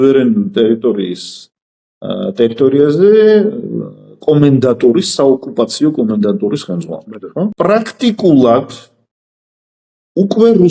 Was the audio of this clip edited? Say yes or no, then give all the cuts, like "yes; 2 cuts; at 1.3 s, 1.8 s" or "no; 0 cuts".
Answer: yes; 1 cut; at 7.5 s